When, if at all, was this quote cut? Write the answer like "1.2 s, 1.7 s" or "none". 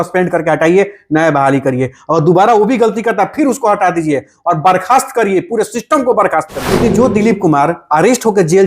6.6 s